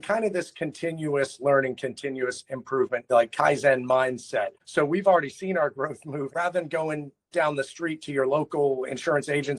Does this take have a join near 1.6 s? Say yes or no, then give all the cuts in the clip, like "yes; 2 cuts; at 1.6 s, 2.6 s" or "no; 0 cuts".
no; 3 cuts; at 3.0 s, 4.6 s, 6.3 s